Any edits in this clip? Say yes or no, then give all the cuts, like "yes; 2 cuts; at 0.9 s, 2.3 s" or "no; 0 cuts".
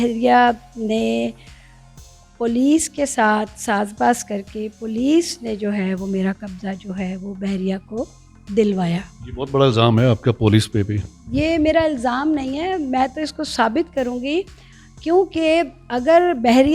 no; 0 cuts